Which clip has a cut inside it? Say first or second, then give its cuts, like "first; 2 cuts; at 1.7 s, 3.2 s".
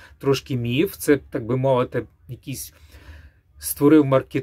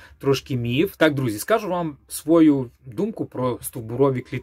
second; 1 cut; at 0.9 s